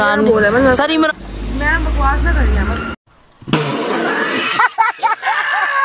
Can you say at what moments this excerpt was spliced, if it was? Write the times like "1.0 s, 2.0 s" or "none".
none